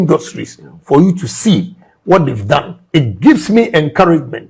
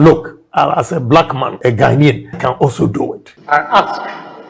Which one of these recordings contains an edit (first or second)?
second